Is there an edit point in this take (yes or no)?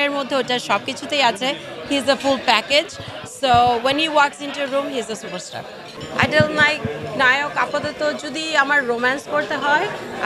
yes